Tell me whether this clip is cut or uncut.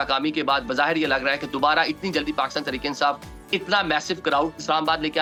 uncut